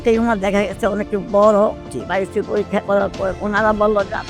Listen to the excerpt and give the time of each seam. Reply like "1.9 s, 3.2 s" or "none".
1.8 s, 3.4 s